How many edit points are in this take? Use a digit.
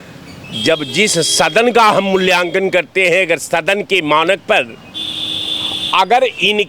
0